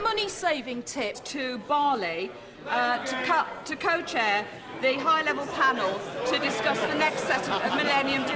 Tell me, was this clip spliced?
no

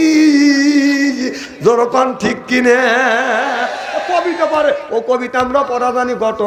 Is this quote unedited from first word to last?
yes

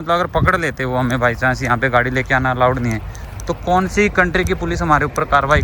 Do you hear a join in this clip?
no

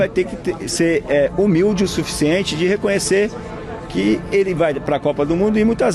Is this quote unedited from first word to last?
yes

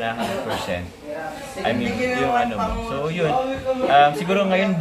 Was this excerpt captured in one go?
yes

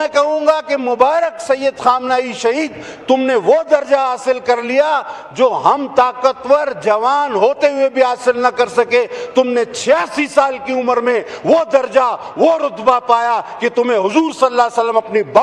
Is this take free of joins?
yes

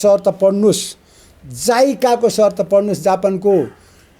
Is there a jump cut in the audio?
no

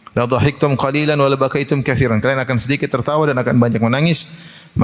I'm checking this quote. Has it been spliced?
no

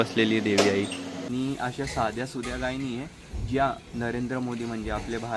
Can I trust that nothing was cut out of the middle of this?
no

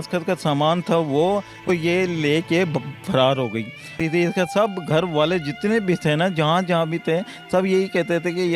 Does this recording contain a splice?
yes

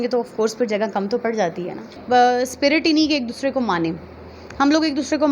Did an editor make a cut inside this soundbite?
yes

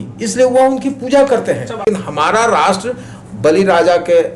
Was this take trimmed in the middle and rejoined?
yes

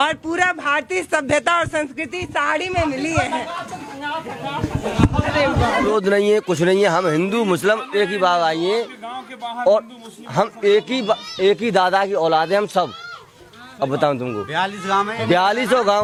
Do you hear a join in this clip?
no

